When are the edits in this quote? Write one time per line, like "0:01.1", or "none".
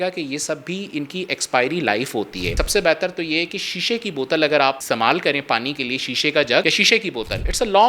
0:02.5
0:04.8